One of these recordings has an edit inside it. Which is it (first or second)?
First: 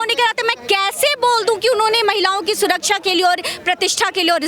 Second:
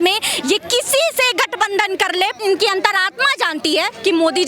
second